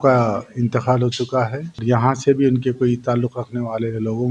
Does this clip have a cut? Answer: yes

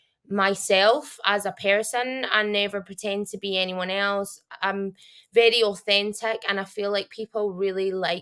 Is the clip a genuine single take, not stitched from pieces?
yes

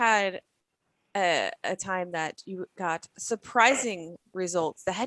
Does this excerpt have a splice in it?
no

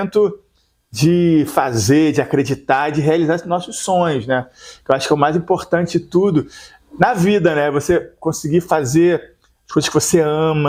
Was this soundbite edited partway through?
no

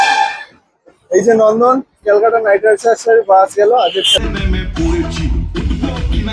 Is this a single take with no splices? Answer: no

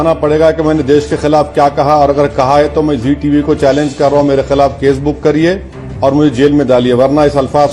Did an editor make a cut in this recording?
no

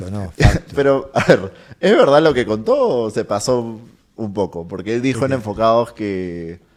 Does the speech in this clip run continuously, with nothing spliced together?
yes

